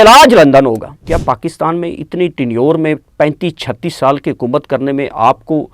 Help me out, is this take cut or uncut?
cut